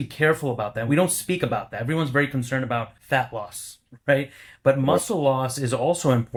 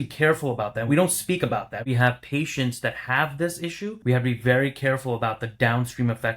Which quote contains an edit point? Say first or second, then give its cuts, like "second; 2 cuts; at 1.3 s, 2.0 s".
second; 2 cuts; at 1.9 s, 4.0 s